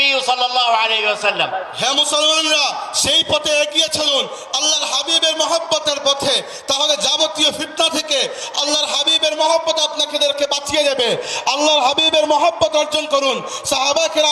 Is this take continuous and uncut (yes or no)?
yes